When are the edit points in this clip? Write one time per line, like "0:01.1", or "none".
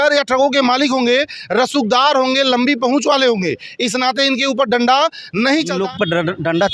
0:05.8